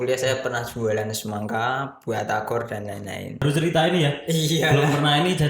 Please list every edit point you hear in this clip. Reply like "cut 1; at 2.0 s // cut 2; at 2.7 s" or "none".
cut 1; at 3.4 s